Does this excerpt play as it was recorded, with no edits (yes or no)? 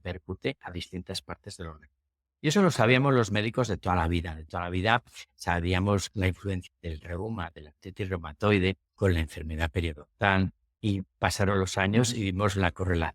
no